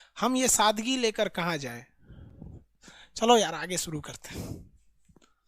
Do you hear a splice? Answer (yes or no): no